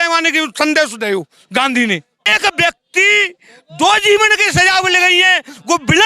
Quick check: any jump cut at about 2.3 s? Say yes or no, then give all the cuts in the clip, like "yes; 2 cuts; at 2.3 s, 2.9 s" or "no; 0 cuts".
yes; 1 cut; at 2.3 s